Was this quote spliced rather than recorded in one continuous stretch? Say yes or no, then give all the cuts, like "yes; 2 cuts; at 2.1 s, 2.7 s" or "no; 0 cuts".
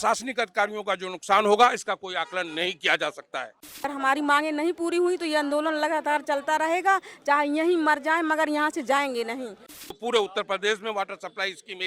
yes; 2 cuts; at 3.8 s, 9.9 s